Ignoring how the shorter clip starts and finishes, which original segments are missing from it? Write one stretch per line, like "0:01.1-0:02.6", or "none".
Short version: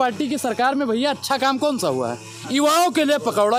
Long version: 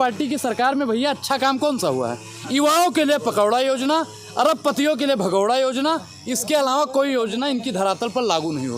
none